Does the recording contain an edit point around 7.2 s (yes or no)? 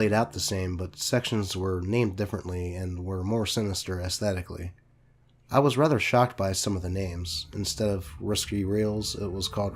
no